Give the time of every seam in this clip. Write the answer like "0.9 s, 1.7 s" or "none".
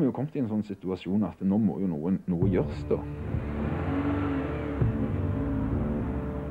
none